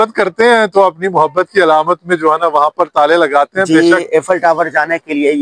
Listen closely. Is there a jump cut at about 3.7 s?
yes; 1 cut; at 3.7 s

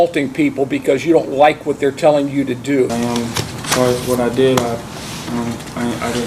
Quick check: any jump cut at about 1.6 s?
no; 1 cut; at 2.9 s

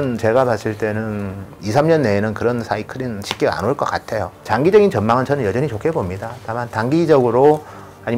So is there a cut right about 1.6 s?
yes; 2 cuts; at 1.6 s, 4.5 s

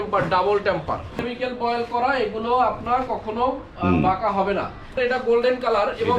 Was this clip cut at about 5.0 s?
yes; 2 cuts; at 1.2 s, 5.0 s

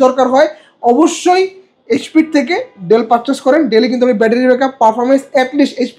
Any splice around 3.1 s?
no; 0 cuts

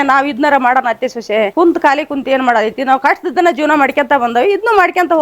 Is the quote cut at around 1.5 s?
yes; 1 cut; at 1.5 s

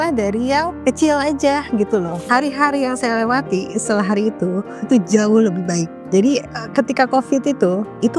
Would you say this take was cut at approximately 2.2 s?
yes; 1 cut; at 2.2 s

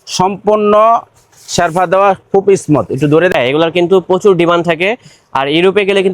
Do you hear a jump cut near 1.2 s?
no; 1 cut; at 3.3 s

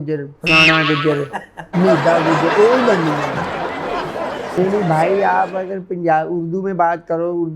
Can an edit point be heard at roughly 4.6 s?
yes; 1 cut; at 4.6 s

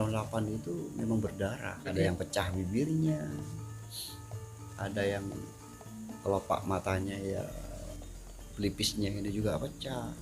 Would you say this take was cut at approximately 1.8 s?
yes; 1 cut; at 1.8 s

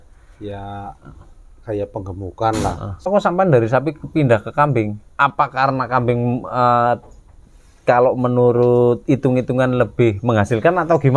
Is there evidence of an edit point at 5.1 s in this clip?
no; 1 cut; at 3.1 s

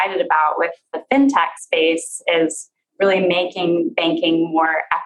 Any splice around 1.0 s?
yes; 1 cut; at 1.0 s

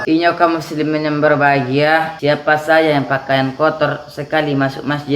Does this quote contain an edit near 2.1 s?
yes; 1 cut; at 2.1 s

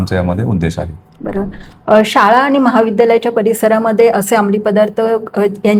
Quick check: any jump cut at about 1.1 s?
no; 0 cuts

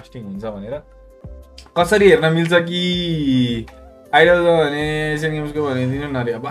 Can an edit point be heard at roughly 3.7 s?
no; 1 cut; at 1.3 s

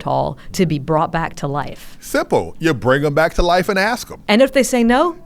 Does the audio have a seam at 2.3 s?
no; 1 cut; at 4.1 s

